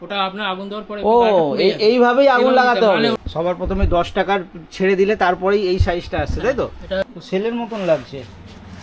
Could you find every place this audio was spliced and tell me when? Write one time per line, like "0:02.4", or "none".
0:03.2
0:07.0

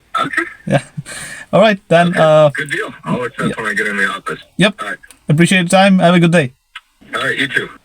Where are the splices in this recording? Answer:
0:06.9

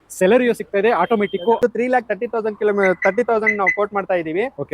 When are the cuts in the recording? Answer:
0:01.6

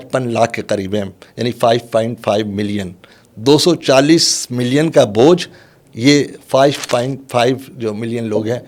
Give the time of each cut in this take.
none

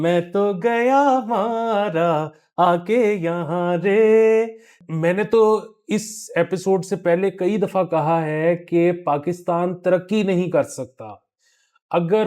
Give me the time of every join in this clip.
0:04.7

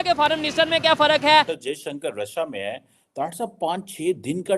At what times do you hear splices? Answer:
0:01.5

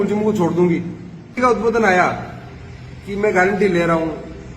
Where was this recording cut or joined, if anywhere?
0:01.3

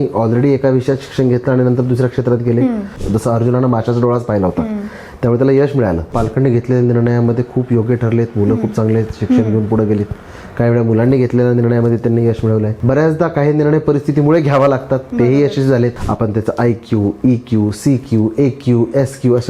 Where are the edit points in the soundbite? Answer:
0:03.0
0:06.1
0:12.7
0:16.0

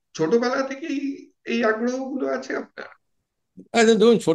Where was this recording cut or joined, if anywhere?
none

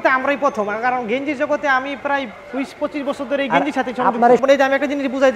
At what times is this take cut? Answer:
0:04.4

